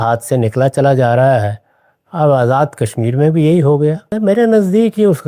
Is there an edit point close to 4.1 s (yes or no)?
yes